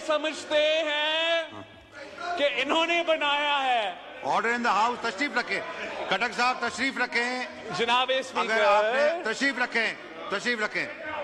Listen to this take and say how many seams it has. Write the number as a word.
zero